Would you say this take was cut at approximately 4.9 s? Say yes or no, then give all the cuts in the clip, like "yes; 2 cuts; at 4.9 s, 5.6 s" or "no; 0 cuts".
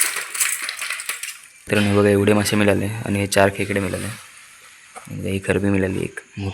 no; 1 cut; at 1.7 s